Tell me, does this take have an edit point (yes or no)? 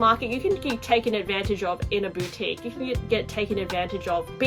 no